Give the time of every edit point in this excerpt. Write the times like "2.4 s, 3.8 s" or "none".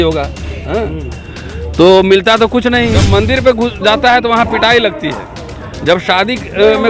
3.0 s